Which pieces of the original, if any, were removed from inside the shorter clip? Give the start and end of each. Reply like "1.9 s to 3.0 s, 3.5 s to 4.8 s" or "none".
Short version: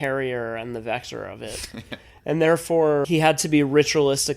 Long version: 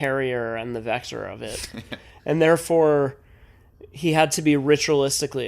3.1 s to 4.0 s

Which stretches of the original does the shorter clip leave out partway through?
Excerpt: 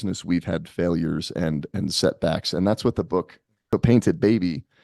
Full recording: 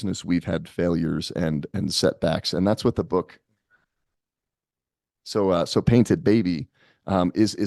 3.7 s to 5.7 s

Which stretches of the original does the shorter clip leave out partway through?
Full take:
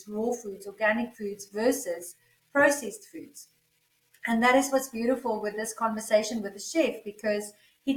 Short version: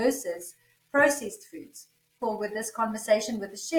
3.8 s to 5.2 s

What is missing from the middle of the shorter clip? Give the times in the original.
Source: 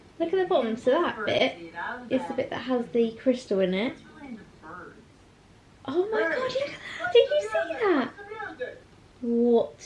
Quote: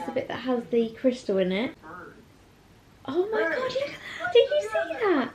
4.1 s to 4.7 s

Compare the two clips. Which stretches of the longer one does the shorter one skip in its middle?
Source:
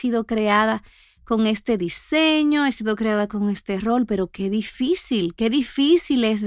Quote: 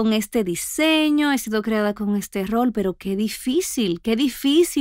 none

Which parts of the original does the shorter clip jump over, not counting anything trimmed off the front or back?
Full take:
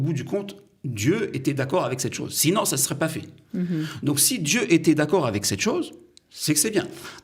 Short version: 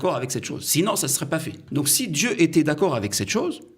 3.3 s to 3.9 s

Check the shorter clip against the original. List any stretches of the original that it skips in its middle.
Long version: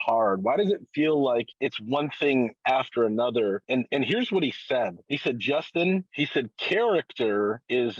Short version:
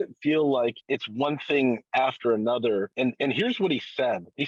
none

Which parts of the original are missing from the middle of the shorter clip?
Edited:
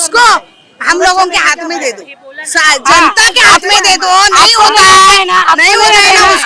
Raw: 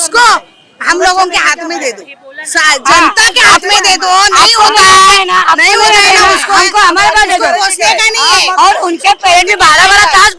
none

